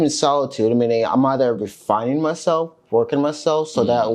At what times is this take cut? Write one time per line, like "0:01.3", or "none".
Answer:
none